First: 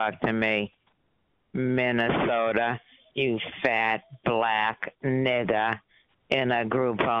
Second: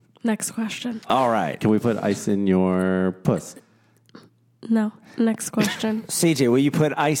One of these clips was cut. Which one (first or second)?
second